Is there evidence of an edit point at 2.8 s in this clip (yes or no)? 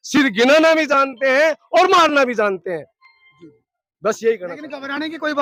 no